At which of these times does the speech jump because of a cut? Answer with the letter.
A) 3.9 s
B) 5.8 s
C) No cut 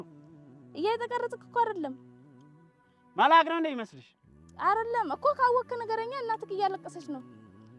C